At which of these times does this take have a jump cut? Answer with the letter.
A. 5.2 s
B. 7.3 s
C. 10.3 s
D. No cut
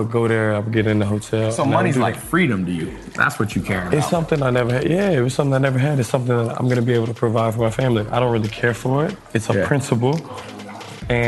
D